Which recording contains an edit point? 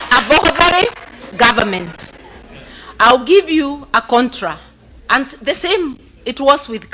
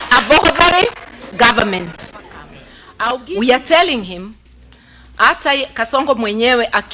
second; 1 cut; at 3.3 s

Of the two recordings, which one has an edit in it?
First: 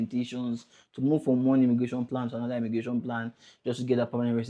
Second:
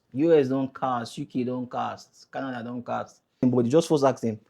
second; 1 cut; at 3.4 s

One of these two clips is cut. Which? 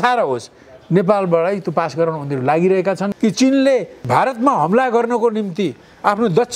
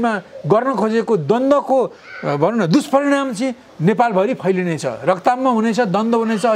first; 1 cut; at 3.1 s

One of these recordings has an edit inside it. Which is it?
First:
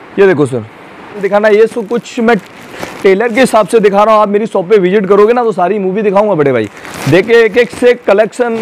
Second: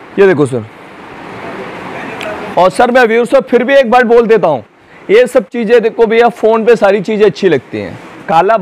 first; 1 cut; at 1.2 s

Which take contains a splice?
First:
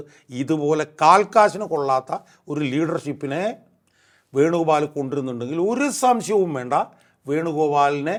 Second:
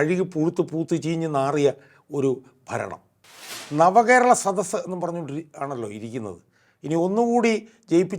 second; 1 cut; at 3.5 s

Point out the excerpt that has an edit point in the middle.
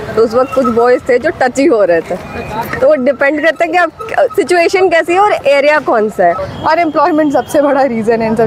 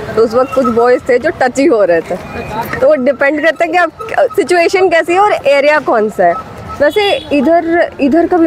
first; 1 cut; at 6.5 s

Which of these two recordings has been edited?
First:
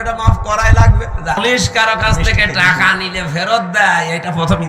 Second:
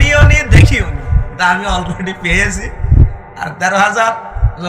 first; 1 cut; at 1.4 s

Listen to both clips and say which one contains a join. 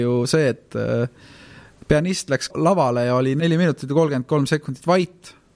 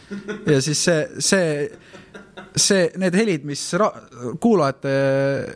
first; 2 cuts; at 2.5 s, 3.4 s

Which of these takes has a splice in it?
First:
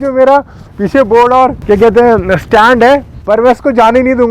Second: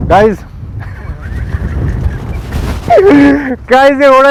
first; 2 cuts; at 1.6 s, 3.1 s

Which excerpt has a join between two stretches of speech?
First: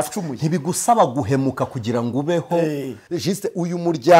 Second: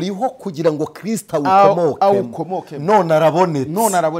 first; 1 cut; at 3.0 s

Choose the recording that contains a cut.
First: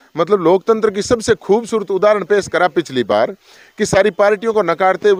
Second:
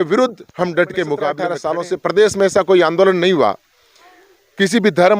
second; 1 cut; at 1.4 s

